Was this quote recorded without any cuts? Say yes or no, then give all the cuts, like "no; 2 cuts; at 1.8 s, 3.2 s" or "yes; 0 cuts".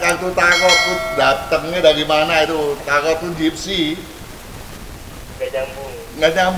yes; 0 cuts